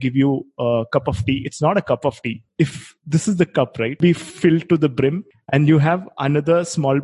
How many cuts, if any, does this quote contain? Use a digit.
3